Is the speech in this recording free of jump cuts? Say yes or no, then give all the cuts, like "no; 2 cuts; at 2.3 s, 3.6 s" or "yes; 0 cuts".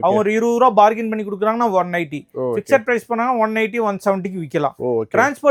yes; 0 cuts